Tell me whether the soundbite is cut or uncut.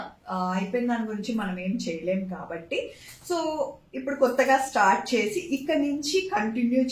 uncut